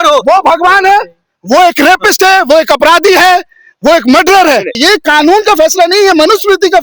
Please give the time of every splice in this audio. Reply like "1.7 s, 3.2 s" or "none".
4.8 s